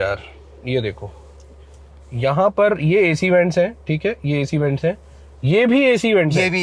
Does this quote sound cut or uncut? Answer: uncut